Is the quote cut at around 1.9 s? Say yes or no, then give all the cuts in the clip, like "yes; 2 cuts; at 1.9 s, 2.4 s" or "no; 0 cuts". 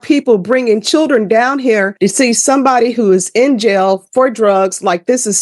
yes; 1 cut; at 1.9 s